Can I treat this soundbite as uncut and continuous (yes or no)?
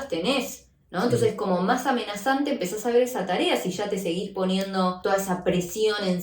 no